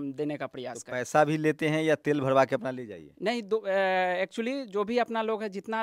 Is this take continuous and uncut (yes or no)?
yes